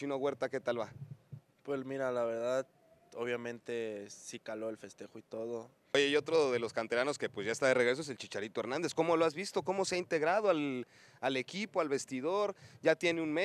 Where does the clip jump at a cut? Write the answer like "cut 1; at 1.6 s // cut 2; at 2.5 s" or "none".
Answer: cut 1; at 5.9 s

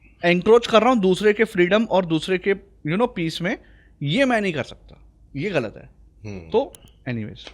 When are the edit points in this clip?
none

